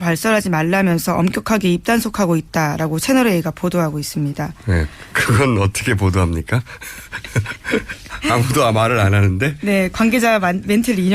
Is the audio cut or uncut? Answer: cut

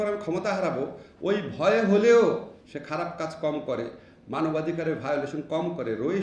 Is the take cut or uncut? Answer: uncut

